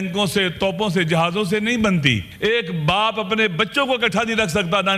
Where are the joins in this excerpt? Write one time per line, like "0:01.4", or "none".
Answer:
0:02.3